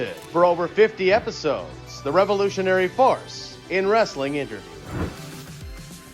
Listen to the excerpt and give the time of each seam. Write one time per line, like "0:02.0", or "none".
0:05.2